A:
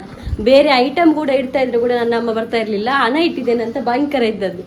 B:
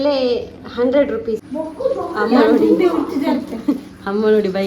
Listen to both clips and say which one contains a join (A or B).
B